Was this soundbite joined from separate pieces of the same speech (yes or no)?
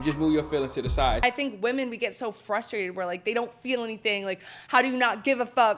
yes